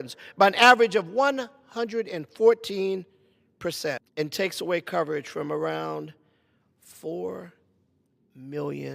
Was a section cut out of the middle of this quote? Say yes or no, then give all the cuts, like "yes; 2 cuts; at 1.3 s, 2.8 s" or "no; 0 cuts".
yes; 1 cut; at 4.1 s